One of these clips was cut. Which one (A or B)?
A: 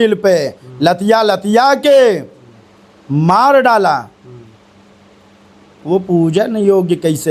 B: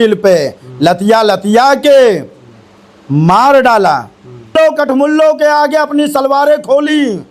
B